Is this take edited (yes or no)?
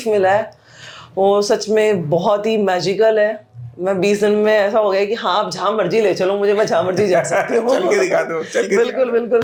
no